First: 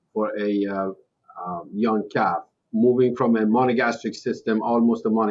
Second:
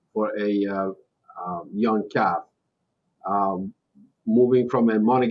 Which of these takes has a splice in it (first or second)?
first